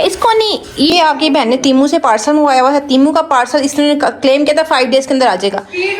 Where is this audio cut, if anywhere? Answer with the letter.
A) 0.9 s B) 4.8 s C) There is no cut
A